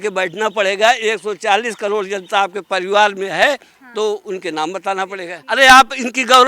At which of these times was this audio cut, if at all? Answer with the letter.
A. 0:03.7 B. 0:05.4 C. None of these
B